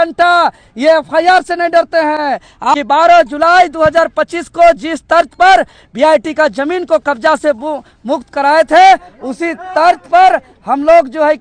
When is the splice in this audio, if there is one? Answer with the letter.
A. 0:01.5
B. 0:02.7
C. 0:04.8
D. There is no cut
B